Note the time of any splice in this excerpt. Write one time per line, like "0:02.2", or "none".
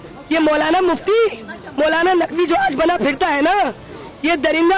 none